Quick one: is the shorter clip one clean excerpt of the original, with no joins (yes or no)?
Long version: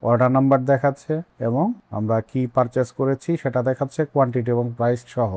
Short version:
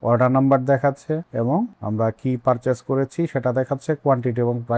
no